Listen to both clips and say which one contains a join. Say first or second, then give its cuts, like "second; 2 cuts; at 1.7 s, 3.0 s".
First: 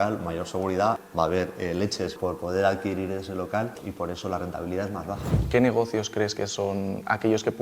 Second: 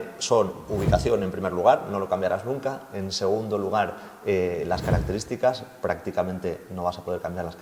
first; 4 cuts; at 1.0 s, 2.1 s, 3.8 s, 5.4 s